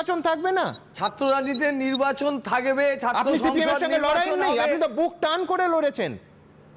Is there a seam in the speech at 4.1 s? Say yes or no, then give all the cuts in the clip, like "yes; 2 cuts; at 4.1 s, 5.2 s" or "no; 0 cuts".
no; 0 cuts